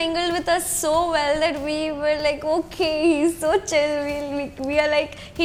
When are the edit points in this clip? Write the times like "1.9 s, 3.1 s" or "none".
none

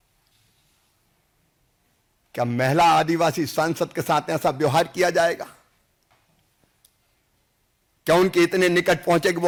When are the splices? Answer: none

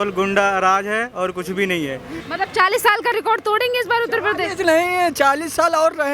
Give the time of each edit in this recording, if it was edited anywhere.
2.1 s

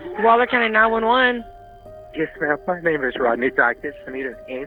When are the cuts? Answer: none

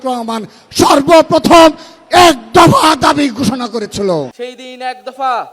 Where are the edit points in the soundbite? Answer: 4.3 s

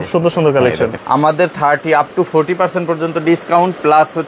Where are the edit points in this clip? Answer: 1.0 s

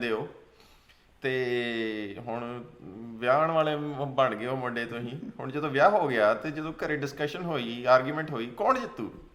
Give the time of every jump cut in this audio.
none

